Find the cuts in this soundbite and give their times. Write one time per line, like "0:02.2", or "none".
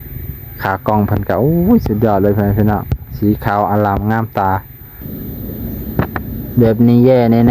0:05.0